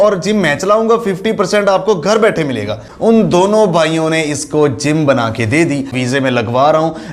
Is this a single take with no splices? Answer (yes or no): no